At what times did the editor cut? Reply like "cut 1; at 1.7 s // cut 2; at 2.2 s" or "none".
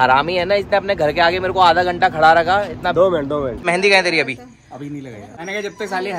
cut 1; at 3.6 s // cut 2; at 5.2 s

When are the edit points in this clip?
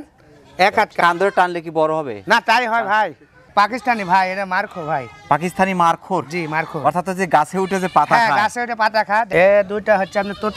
cut 1; at 1.0 s // cut 2; at 3.5 s // cut 3; at 9.3 s

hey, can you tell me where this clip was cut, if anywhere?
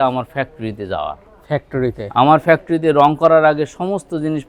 none

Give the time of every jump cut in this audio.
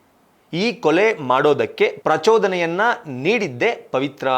none

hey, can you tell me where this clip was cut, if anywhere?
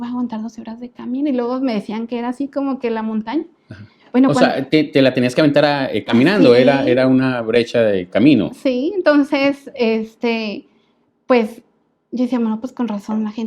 none

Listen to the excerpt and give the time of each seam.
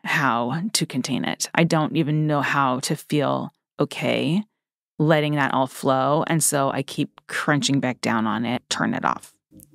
cut 1; at 8.6 s

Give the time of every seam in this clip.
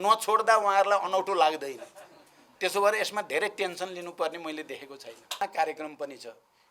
cut 1; at 5.4 s

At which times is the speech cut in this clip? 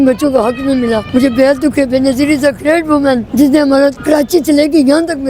cut 1; at 1.0 s // cut 2; at 3.3 s // cut 3; at 4.0 s

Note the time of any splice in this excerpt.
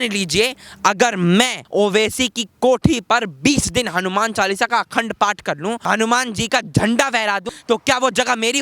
cut 1; at 1.6 s // cut 2; at 5.8 s // cut 3; at 7.5 s

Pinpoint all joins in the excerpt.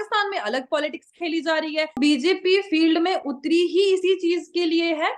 cut 1; at 2.0 s

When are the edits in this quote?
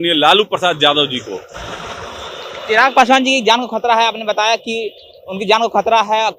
none

